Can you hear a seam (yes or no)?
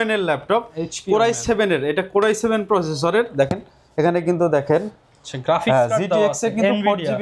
no